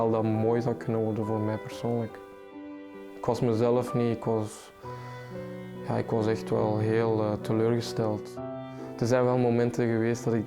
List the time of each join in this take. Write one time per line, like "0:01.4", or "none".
0:02.5
0:08.8